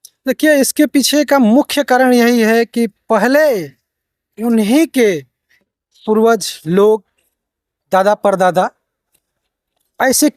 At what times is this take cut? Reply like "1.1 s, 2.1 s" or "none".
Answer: none